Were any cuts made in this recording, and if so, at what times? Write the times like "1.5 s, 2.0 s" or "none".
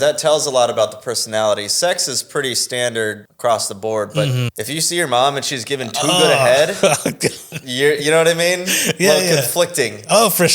3.3 s, 4.5 s, 7.5 s